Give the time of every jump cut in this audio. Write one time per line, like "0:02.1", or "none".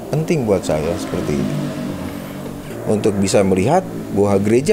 0:02.6